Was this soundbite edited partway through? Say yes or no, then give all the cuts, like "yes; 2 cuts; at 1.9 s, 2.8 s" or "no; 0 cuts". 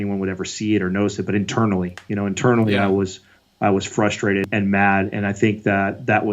yes; 1 cut; at 4.5 s